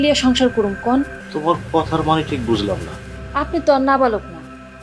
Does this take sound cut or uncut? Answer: cut